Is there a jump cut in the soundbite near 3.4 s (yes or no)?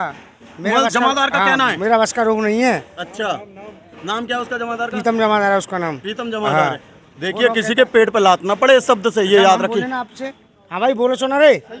no